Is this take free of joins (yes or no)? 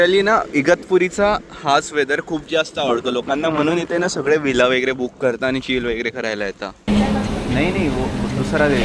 yes